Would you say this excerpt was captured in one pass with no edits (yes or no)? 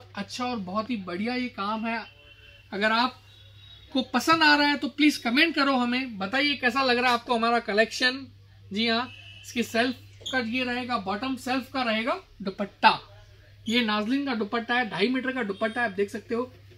yes